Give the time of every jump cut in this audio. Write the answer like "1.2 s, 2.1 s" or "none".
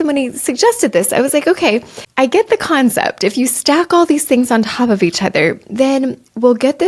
2.0 s